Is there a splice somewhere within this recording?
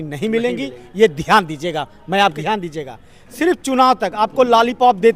yes; 1 cut; at 2.3 s

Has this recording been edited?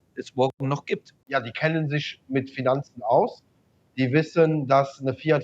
yes; 1 cut; at 1.2 s

